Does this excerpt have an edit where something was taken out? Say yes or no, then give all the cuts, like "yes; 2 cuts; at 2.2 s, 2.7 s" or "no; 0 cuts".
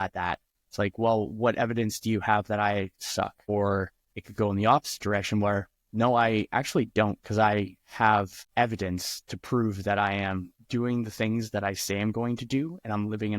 yes; 2 cuts; at 3.5 s, 8.4 s